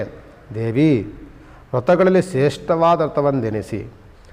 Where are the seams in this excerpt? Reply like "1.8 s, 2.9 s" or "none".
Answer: none